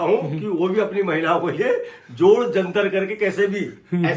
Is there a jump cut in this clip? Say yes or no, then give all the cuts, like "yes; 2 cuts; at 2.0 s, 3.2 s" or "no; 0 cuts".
no; 0 cuts